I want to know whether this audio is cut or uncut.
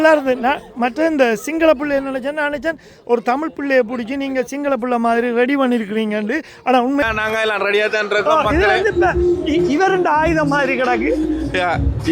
cut